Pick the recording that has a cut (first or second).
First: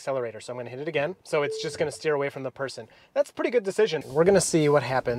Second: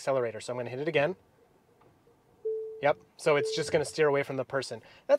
first